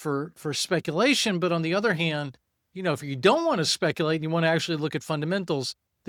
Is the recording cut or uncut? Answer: uncut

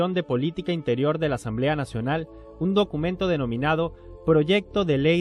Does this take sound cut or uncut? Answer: cut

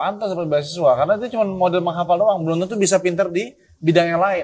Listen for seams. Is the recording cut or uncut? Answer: uncut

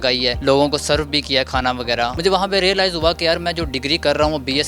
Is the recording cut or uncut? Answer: cut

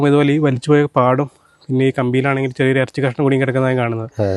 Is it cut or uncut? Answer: uncut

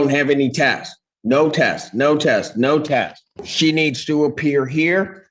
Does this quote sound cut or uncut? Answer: cut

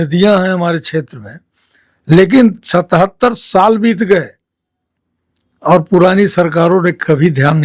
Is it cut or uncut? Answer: uncut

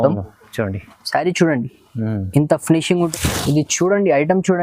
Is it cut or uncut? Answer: cut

